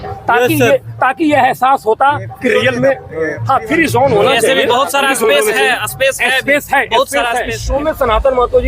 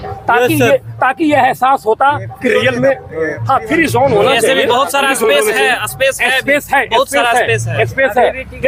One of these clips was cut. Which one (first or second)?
first